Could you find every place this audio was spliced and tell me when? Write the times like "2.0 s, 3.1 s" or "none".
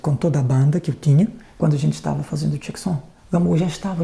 1.4 s, 3.1 s